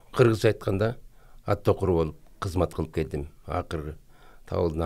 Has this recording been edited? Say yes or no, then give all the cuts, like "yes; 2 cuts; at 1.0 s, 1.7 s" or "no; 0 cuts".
no; 0 cuts